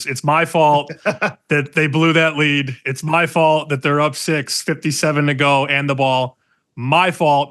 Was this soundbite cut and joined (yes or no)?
no